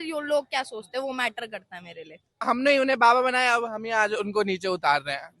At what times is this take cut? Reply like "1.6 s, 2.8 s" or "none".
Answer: 2.3 s